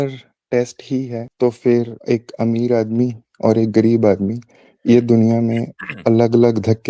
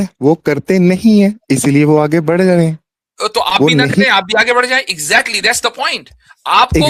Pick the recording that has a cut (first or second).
first